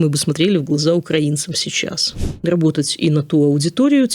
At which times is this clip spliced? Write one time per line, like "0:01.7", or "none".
0:02.1